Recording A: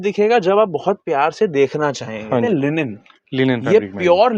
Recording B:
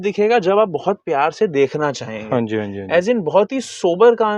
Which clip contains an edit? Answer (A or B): A